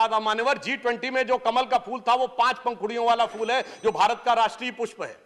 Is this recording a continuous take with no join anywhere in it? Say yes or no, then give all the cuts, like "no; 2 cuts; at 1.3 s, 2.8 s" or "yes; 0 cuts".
yes; 0 cuts